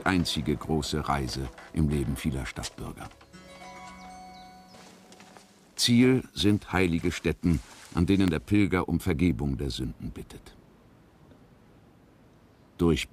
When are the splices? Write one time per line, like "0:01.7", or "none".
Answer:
none